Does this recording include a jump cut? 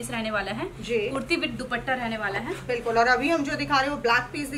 no; 0 cuts

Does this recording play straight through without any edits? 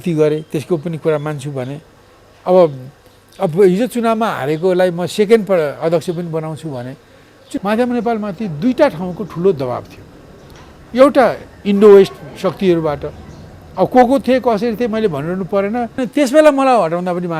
no; 2 cuts; at 7.4 s, 16.0 s

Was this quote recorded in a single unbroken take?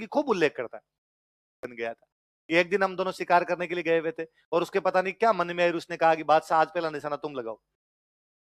no; 1 cut; at 1.6 s

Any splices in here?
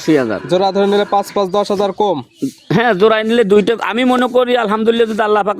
no; 0 cuts

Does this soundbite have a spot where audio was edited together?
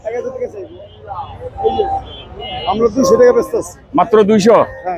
no; 0 cuts

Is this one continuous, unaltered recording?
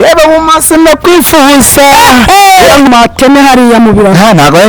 no; 1 cut; at 2.9 s

